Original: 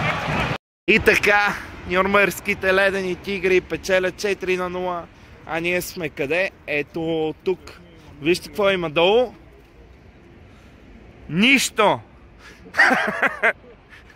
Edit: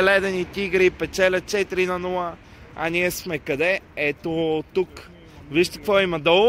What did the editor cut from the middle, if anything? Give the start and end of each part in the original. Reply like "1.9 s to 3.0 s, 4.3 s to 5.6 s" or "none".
none